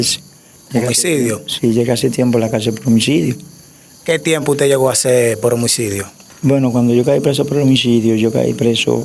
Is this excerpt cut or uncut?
uncut